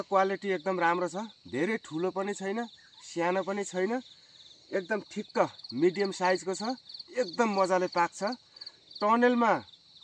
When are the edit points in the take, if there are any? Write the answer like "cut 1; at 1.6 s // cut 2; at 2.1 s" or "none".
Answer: none